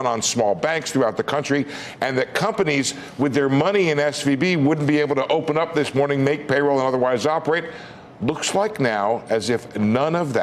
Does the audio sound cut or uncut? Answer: uncut